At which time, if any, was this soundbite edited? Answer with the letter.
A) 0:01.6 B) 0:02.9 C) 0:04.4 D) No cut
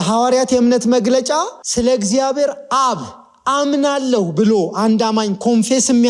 A